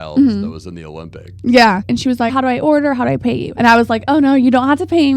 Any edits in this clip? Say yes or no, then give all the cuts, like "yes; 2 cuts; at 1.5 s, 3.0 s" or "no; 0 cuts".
yes; 2 cuts; at 2.3 s, 3.5 s